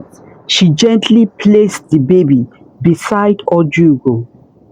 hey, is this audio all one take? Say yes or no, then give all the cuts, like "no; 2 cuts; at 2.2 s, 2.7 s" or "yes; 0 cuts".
yes; 0 cuts